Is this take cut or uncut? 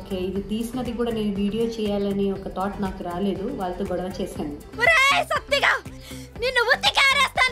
uncut